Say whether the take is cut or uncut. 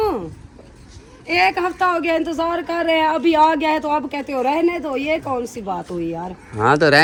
uncut